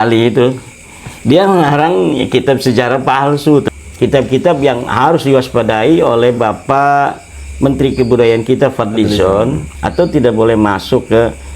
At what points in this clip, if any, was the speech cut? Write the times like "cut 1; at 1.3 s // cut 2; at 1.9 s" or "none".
cut 1; at 3.7 s // cut 2; at 9.7 s